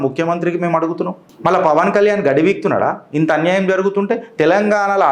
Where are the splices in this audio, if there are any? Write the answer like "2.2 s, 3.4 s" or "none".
1.2 s